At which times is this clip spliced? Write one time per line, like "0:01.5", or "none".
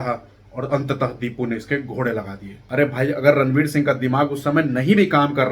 0:02.6